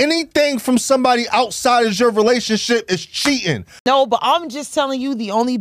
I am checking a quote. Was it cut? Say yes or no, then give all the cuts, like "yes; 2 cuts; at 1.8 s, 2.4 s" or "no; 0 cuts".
yes; 1 cut; at 3.8 s